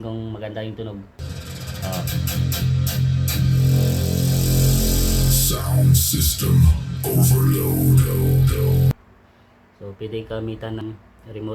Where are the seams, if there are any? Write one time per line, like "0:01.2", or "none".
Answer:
0:01.3
0:08.9
0:10.8